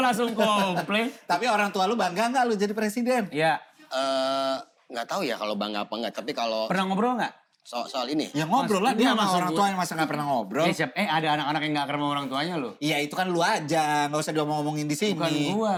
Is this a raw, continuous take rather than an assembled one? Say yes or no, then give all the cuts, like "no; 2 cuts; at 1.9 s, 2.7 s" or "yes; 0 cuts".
yes; 0 cuts